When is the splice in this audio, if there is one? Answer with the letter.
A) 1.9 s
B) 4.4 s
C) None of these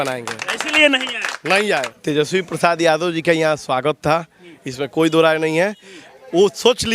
A